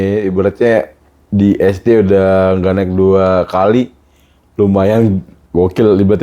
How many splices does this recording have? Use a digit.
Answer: 0